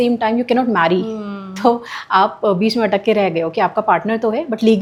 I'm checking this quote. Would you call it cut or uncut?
uncut